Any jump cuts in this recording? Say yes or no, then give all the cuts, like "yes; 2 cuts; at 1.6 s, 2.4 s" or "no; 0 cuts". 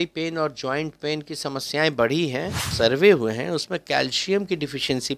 yes; 1 cut; at 2.7 s